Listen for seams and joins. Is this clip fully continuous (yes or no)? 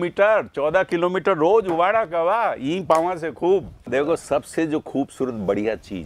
no